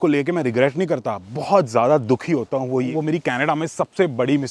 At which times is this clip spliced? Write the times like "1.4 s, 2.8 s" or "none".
2.9 s